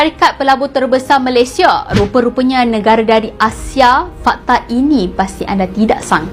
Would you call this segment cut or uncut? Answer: uncut